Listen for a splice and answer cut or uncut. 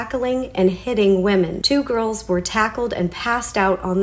cut